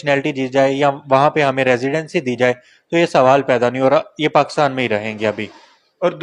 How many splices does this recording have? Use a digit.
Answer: 0